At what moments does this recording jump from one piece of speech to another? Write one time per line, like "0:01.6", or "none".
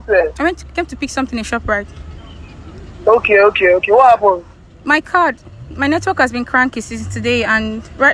none